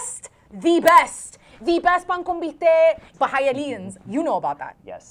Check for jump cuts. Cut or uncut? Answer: cut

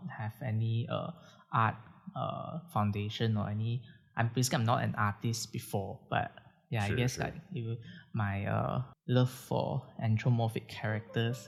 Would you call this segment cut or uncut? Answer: uncut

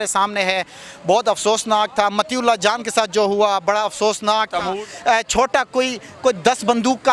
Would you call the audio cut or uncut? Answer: cut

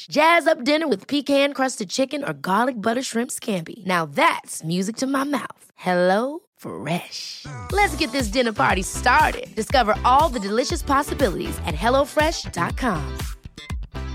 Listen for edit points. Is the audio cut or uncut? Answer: uncut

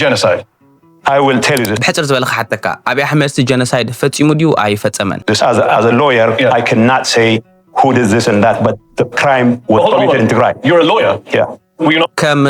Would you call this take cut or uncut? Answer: cut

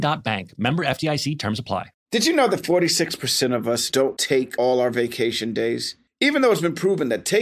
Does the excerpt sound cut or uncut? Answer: cut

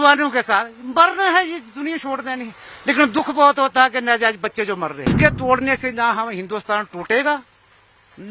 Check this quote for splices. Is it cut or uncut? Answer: cut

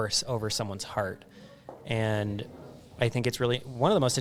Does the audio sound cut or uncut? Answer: uncut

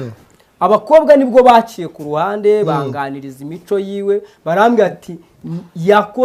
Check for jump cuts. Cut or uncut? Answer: uncut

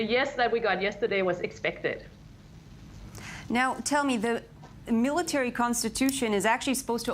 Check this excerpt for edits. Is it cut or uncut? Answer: cut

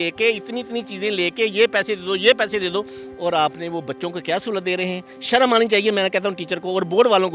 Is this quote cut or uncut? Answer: uncut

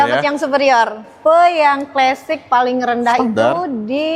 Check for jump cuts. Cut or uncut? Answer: cut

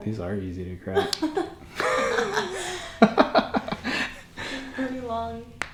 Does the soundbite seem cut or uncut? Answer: uncut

